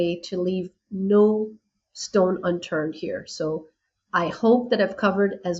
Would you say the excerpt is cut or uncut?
uncut